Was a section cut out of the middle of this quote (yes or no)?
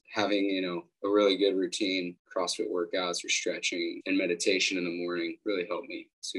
yes